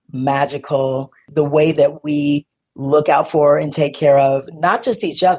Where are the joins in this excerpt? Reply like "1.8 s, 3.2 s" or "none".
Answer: 1.2 s